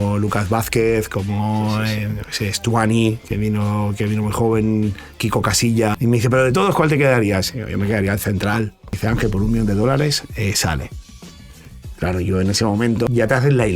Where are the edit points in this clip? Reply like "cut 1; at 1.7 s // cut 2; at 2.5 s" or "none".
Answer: cut 1; at 5.9 s // cut 2; at 9.0 s // cut 3; at 13.1 s